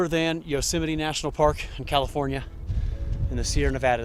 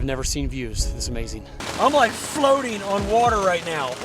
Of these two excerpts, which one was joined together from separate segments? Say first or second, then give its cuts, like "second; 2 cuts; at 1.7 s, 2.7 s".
second; 1 cut; at 1.6 s